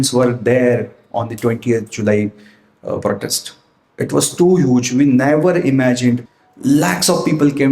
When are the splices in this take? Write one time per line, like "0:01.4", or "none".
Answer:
0:06.3